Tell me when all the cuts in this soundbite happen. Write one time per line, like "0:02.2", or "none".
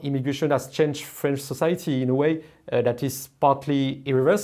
none